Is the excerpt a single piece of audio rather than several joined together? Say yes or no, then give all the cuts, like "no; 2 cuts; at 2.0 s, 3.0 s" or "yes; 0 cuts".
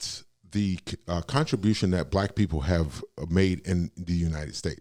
yes; 0 cuts